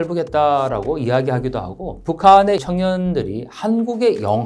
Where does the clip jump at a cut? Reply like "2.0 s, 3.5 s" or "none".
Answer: 2.0 s, 2.6 s

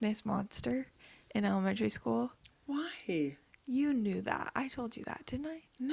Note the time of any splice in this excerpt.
none

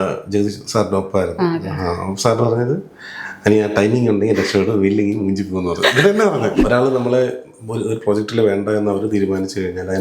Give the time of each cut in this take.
6.6 s

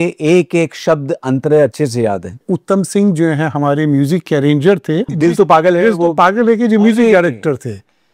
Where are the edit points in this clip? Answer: 2.4 s, 5.1 s

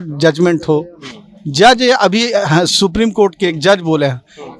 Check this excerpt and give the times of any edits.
none

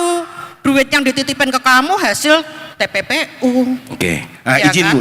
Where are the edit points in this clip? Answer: none

